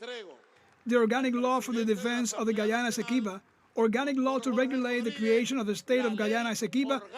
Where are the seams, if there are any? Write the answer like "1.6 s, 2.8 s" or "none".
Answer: 2.8 s

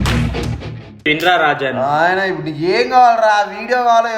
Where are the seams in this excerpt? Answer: 1.0 s

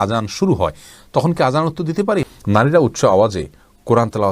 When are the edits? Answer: 2.3 s

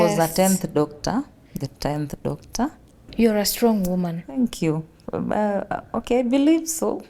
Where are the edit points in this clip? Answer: none

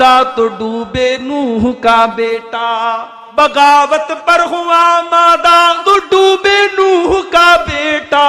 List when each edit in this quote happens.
3.1 s, 5.8 s

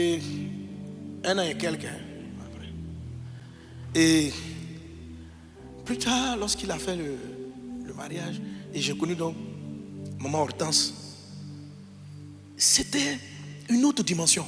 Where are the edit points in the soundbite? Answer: none

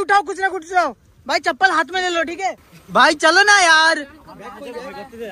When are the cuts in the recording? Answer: 2.7 s

